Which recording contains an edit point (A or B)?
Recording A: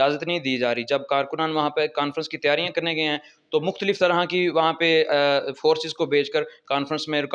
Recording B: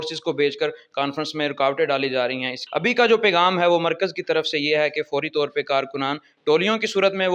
B